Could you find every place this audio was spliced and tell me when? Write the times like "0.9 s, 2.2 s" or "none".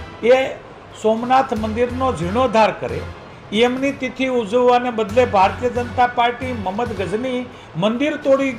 none